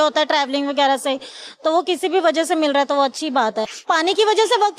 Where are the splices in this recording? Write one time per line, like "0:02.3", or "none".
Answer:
0:03.9

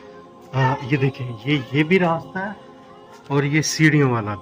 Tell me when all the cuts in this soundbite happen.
none

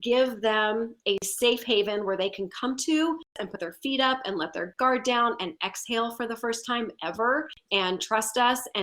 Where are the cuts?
0:03.4
0:07.6

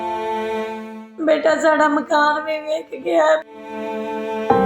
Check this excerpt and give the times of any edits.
0:00.8
0:03.6

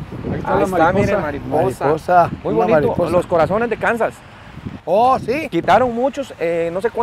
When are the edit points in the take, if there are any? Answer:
none

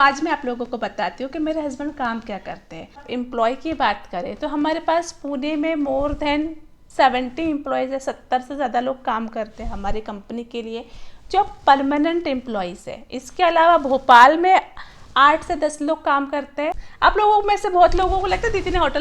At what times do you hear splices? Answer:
0:03.0
0:16.8

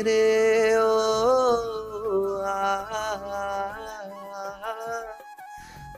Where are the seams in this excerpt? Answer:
none

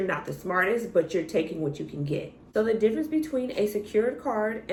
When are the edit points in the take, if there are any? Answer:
none

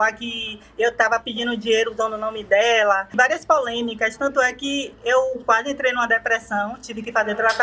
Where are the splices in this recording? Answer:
0:03.1

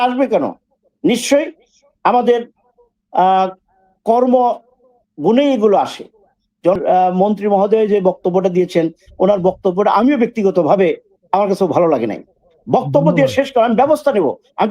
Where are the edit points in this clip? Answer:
0:06.8

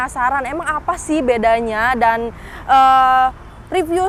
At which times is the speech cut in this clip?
none

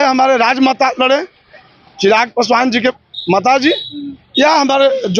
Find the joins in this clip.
none

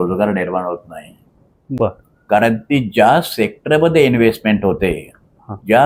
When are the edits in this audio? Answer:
none

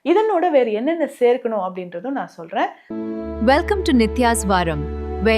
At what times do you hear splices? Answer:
0:02.8

